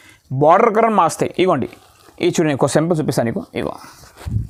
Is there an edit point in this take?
no; 0 cuts

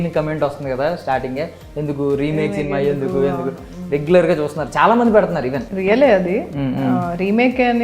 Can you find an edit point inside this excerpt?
yes; 1 cut; at 5.7 s

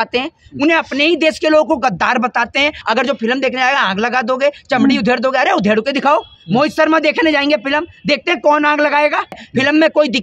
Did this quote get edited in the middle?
yes; 2 cuts; at 2.8 s, 9.4 s

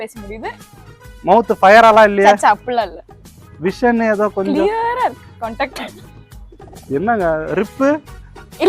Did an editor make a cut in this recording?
no; 0 cuts

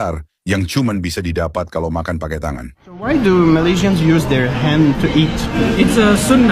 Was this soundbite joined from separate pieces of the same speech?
yes; 1 cut; at 3.1 s

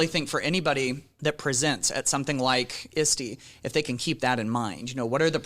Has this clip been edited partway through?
yes; 1 cut; at 1.1 s

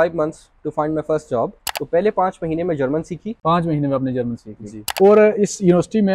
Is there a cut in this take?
yes; 3 cuts; at 1.6 s, 3.3 s, 4.9 s

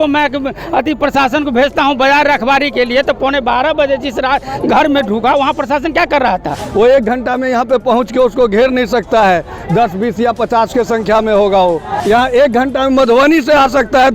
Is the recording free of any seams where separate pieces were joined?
no; 2 cuts; at 6.6 s, 11.9 s

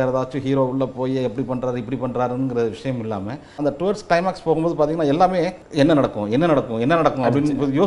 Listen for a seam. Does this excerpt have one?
yes; 2 cuts; at 3.6 s, 5.6 s

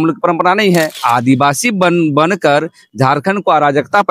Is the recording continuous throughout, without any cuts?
no; 1 cut; at 1.0 s

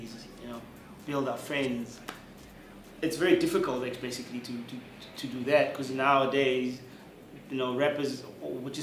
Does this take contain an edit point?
no; 0 cuts

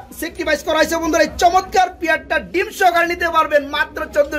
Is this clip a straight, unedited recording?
yes; 0 cuts

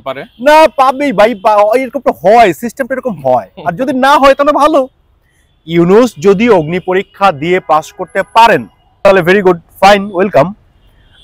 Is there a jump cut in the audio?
yes; 1 cut; at 9.0 s

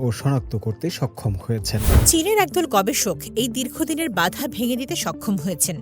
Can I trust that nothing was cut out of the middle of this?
no; 1 cut; at 2.0 s

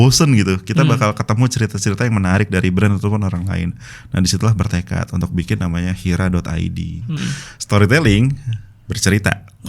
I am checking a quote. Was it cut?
yes; 1 cut; at 7.2 s

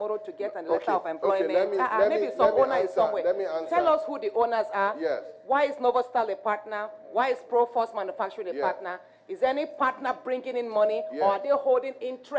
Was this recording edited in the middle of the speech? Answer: no; 0 cuts

